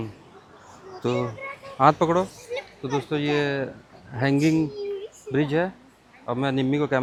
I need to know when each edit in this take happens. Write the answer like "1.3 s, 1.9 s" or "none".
none